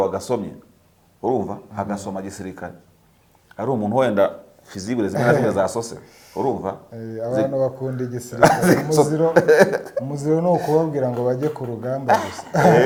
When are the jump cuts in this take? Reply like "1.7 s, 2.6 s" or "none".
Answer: none